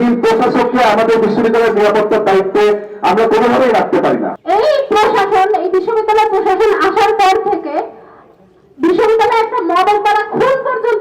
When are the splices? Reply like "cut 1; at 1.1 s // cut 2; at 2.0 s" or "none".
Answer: cut 1; at 4.3 s